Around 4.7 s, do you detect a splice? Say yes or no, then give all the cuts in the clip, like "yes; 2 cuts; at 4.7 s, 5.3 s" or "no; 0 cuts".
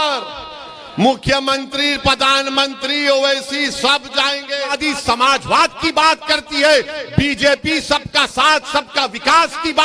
yes; 1 cut; at 4.7 s